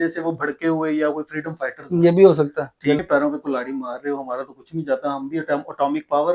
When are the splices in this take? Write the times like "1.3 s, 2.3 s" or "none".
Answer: 3.0 s